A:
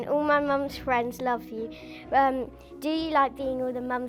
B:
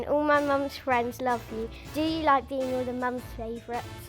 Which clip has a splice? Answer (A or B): B